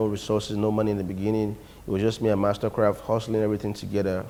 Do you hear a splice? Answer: no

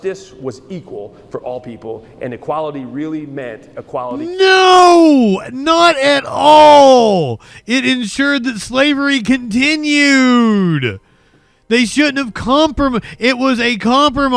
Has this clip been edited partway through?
no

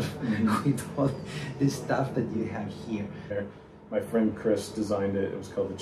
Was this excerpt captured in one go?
no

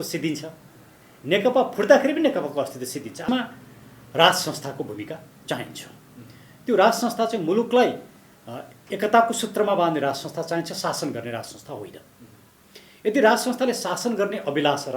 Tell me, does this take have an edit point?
yes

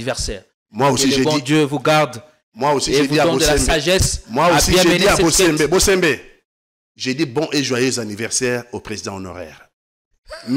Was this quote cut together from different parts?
no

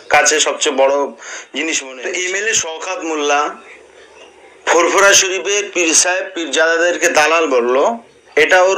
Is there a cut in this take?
yes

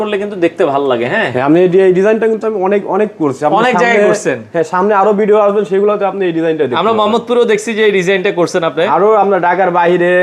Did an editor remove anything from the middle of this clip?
no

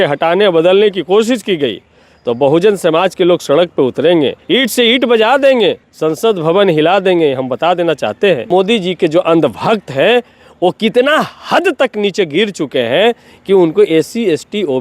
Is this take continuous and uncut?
no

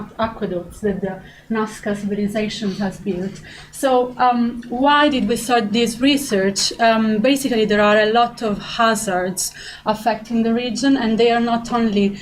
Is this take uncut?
yes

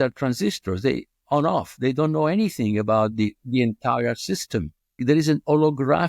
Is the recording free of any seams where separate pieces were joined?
no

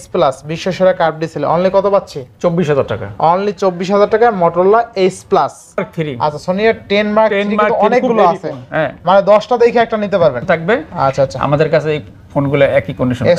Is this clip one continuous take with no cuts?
no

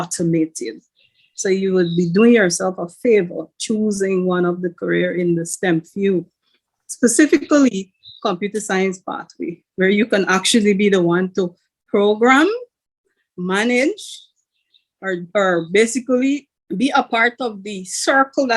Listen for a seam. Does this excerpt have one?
yes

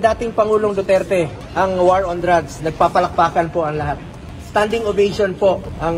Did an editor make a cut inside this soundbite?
yes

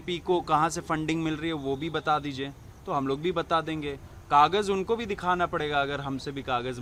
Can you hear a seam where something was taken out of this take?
no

